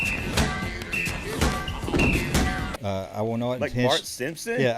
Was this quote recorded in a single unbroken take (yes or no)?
no